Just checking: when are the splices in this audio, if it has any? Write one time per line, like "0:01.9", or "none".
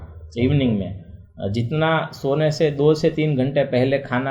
none